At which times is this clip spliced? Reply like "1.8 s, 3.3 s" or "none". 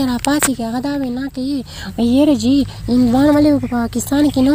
none